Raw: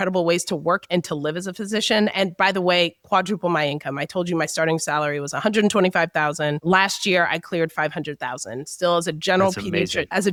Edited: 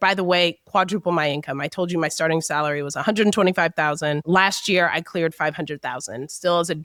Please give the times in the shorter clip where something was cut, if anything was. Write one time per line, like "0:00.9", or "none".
none